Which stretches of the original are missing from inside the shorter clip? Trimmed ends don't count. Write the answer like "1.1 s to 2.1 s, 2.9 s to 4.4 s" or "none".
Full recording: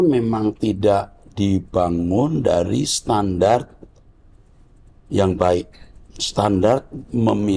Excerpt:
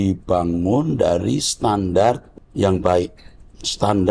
3.8 s to 4.9 s